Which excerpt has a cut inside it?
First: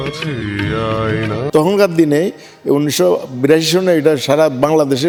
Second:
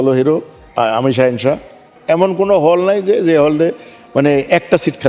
second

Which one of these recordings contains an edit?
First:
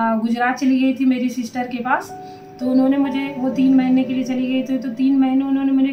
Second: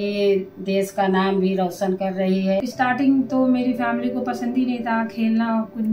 second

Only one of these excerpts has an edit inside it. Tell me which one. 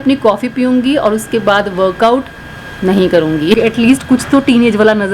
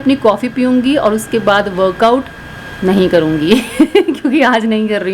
first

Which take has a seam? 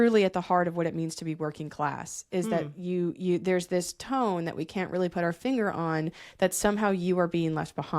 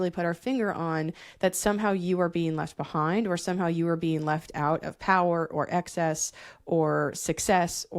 first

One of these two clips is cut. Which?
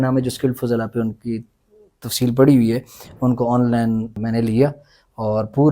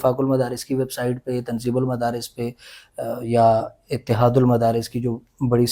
first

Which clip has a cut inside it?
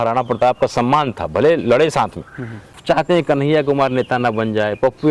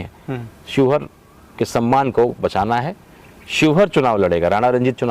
first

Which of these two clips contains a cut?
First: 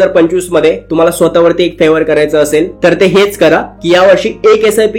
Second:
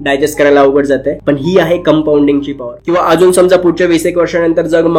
second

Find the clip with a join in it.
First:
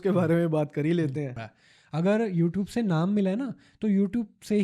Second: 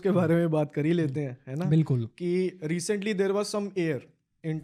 first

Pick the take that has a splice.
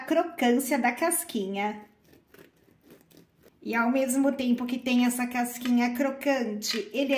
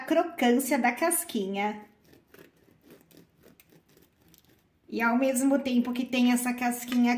first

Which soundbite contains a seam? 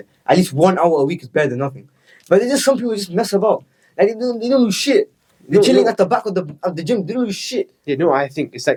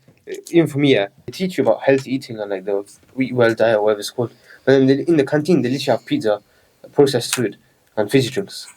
second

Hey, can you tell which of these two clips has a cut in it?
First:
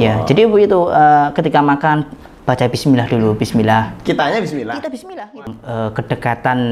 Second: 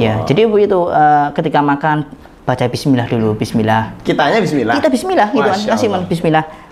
first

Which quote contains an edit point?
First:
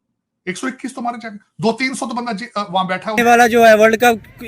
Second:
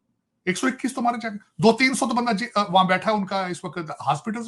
first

